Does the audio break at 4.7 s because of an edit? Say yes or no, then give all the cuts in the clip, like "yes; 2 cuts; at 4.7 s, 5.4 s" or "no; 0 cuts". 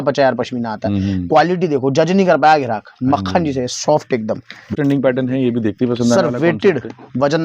yes; 1 cut; at 4.7 s